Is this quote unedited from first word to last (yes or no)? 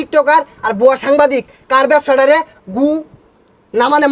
yes